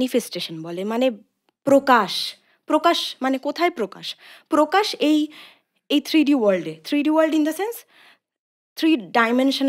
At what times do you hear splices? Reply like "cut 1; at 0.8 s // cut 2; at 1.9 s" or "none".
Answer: none